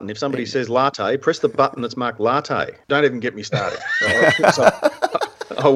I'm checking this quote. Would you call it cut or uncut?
cut